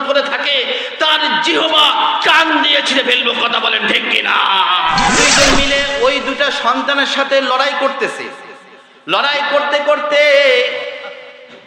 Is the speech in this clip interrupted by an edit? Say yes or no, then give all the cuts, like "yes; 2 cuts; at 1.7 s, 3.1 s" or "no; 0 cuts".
yes; 1 cut; at 5.1 s